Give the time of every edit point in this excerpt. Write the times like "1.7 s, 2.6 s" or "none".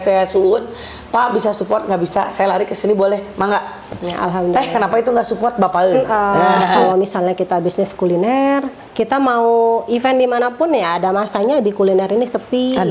6.9 s